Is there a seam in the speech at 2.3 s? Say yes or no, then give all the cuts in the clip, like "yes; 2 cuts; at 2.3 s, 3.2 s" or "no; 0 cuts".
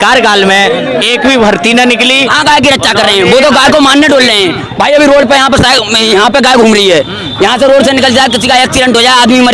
yes; 1 cut; at 2.3 s